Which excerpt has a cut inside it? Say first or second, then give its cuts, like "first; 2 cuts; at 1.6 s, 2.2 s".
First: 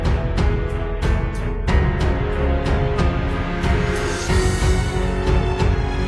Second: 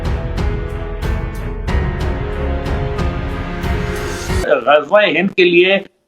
second; 1 cut; at 4.4 s